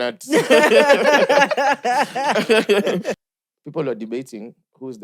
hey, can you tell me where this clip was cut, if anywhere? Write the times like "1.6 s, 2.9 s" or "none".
3.3 s